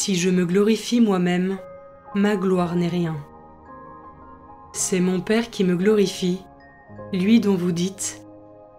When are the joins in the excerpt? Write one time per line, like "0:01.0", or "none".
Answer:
none

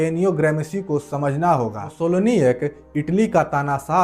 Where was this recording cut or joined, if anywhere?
0:01.9

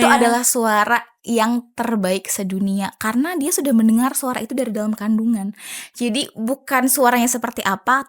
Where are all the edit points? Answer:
none

